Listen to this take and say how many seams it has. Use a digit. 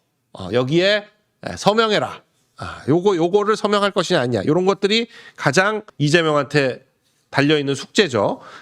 1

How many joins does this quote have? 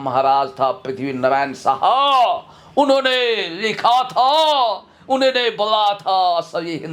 0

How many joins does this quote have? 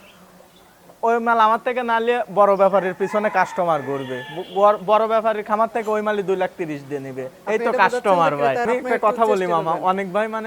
1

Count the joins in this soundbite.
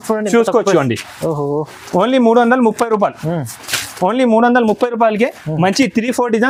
0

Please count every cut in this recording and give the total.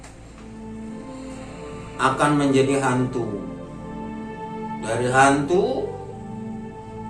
0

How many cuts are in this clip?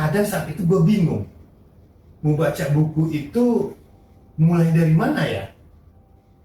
0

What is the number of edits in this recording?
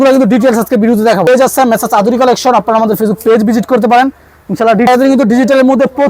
2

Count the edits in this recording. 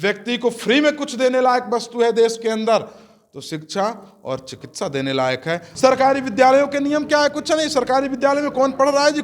1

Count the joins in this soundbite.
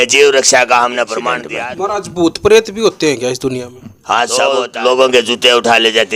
2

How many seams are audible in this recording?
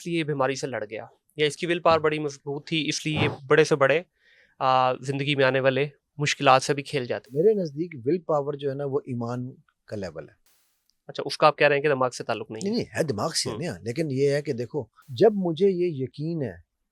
2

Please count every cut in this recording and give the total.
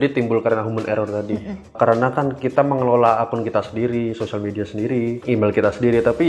2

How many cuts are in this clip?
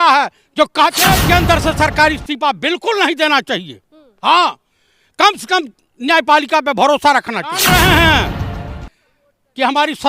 2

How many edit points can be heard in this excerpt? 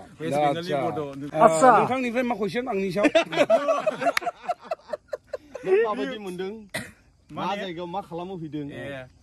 1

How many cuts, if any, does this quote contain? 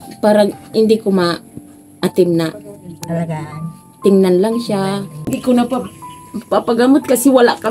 1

